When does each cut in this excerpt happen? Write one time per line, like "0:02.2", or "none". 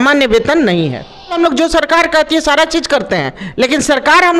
0:01.3